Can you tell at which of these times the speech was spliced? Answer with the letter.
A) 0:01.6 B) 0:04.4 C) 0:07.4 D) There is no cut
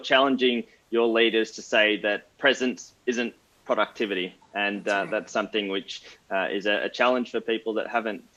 D